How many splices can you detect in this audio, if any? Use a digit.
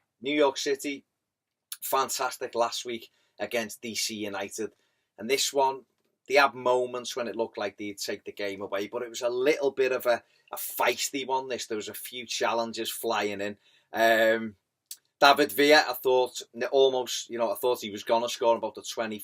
1